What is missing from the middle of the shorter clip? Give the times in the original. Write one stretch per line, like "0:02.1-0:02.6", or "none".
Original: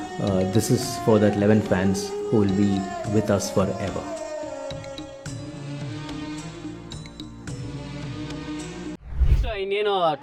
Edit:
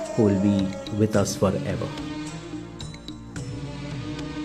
0:04.0-0:05.9